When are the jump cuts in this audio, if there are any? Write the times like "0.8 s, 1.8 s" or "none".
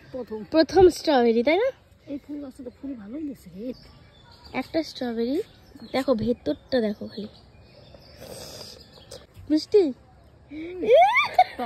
3.7 s, 9.3 s